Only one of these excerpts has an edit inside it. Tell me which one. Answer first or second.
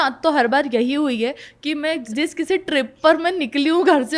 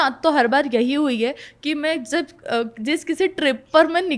first